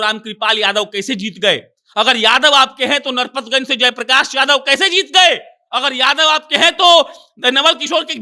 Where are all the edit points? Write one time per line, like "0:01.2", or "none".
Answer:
none